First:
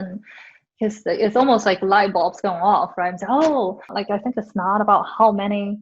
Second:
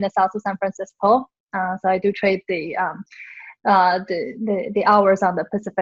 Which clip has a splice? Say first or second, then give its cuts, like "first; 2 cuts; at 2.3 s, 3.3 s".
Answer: first; 1 cut; at 3.9 s